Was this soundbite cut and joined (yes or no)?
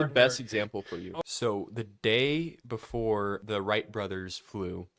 yes